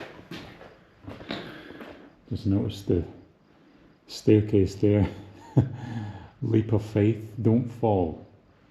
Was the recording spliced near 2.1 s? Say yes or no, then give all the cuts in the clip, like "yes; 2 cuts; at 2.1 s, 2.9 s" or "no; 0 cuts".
yes; 1 cut; at 2.1 s